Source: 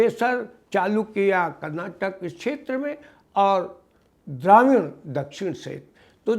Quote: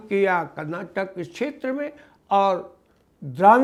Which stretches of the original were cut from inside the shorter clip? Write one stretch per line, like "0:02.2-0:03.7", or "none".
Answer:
none